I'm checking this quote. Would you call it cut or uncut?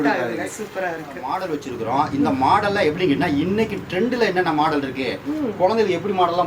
cut